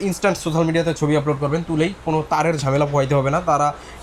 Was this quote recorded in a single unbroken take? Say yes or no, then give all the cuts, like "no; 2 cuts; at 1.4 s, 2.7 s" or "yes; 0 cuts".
yes; 0 cuts